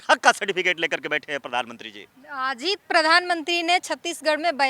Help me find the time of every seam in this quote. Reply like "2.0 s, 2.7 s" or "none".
none